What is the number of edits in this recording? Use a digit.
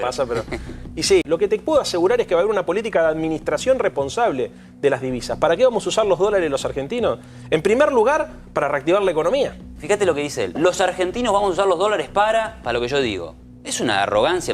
2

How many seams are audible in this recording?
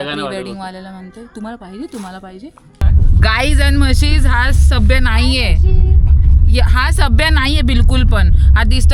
1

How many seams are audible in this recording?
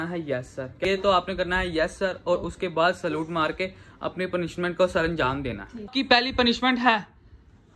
2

